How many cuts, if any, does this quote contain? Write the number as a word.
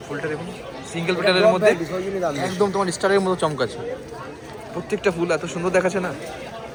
zero